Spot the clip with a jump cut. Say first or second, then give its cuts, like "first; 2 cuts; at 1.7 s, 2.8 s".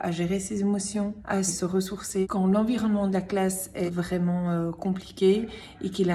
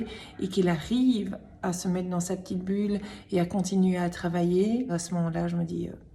second; 1 cut; at 4.9 s